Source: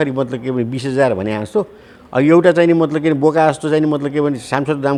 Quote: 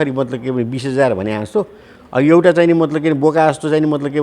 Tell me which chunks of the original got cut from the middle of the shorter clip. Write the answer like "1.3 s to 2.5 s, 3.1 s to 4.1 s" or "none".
none